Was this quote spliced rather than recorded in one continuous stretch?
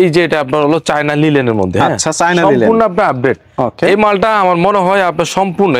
no; 0 cuts

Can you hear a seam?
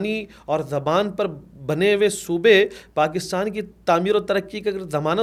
no; 0 cuts

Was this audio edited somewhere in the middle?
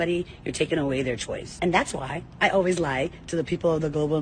yes; 1 cut; at 1.5 s

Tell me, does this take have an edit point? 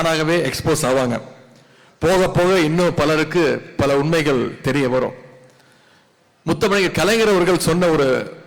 no; 0 cuts

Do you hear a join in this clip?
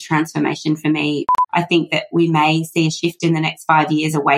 yes; 1 cut; at 1.2 s

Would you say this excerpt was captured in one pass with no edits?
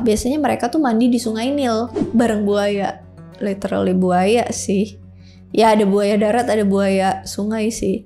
yes; 0 cuts

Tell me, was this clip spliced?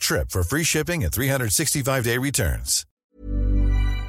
yes; 1 cut; at 3.1 s

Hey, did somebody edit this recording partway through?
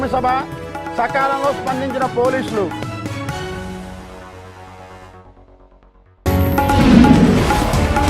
no; 0 cuts

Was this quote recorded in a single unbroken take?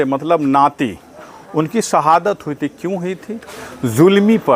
yes; 0 cuts

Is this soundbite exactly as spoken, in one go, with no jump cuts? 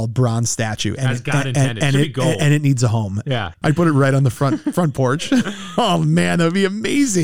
no; 1 cut; at 3.5 s

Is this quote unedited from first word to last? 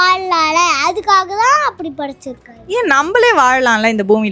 yes; 0 cuts

